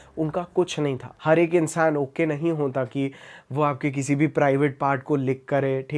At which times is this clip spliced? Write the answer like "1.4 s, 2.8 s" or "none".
1.0 s